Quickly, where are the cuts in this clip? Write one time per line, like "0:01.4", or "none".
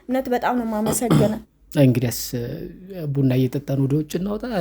0:01.5